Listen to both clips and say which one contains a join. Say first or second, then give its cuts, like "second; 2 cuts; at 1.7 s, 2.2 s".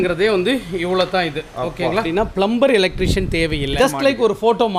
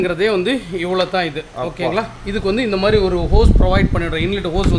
first; 2 cuts; at 2.1 s, 3.7 s